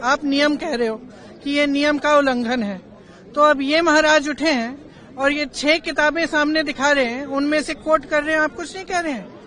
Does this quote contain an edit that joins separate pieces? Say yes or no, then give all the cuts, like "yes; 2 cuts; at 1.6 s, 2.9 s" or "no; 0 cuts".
no; 0 cuts